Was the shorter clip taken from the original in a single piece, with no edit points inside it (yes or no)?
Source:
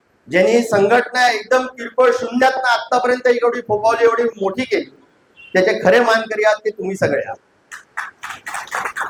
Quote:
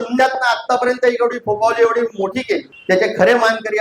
no